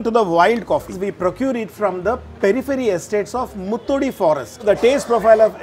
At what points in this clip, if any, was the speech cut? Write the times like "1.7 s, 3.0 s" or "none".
1.0 s, 4.6 s